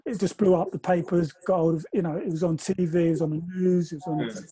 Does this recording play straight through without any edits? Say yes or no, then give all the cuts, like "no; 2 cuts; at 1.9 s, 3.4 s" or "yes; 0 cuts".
yes; 0 cuts